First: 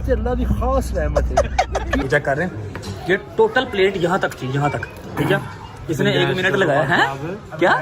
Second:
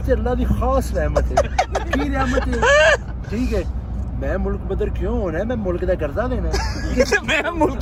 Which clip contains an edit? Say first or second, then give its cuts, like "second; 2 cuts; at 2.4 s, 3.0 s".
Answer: first; 1 cut; at 2.0 s